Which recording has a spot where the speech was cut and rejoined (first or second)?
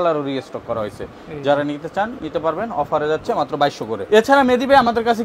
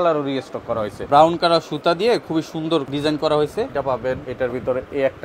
second